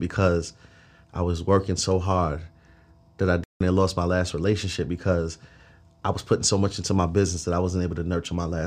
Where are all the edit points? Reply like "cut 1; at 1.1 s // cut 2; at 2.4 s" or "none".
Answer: none